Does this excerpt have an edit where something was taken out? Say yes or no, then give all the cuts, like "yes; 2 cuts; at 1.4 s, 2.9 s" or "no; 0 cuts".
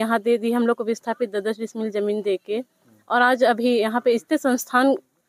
no; 0 cuts